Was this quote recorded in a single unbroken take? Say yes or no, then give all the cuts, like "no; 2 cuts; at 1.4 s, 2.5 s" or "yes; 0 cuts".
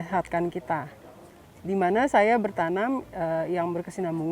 yes; 0 cuts